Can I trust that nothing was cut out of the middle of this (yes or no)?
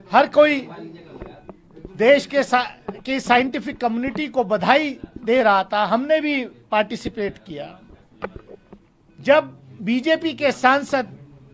yes